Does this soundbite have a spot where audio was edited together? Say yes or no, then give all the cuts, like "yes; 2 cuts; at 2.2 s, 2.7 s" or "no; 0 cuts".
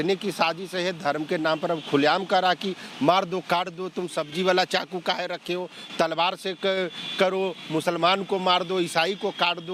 no; 0 cuts